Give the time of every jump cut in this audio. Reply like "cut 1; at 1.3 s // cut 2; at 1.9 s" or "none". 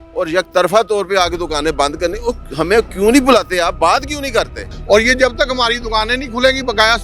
cut 1; at 4.8 s